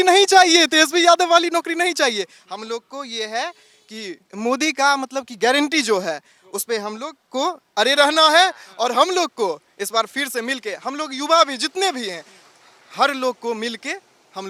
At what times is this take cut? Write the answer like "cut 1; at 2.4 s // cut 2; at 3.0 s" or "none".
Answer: none